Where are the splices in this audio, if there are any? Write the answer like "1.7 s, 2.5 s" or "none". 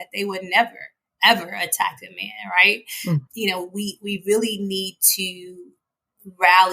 3.2 s